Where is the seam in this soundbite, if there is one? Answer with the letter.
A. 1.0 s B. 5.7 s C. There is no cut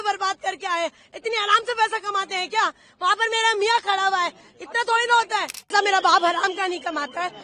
B